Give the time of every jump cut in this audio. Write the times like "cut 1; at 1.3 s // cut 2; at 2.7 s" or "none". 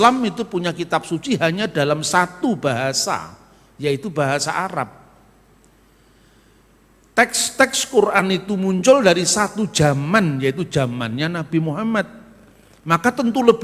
none